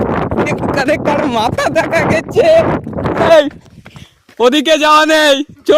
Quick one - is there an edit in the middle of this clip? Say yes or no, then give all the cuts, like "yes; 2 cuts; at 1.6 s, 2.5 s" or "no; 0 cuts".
yes; 1 cut; at 3.3 s